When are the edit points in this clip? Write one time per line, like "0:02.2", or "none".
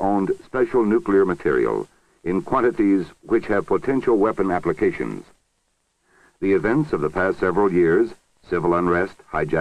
none